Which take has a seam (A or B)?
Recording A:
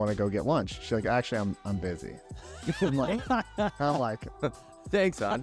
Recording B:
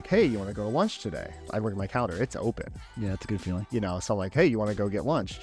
B